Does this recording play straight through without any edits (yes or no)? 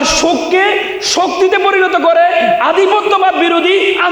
yes